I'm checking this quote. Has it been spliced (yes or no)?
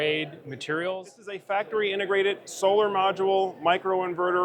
yes